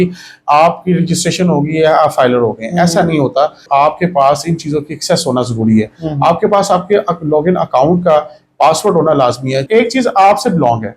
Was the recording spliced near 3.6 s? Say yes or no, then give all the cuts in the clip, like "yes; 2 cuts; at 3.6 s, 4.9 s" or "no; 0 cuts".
yes; 2 cuts; at 3.6 s, 9.6 s